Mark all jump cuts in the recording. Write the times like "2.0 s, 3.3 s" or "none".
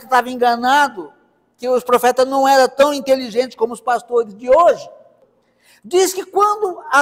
5.0 s